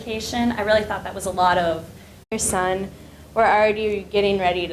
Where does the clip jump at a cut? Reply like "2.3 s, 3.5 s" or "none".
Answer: none